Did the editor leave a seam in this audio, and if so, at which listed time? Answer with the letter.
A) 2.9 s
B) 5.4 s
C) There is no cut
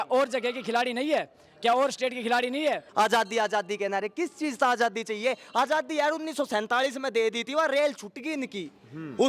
A